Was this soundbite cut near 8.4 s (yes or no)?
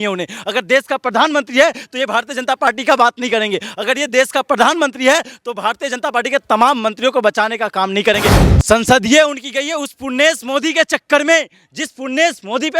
yes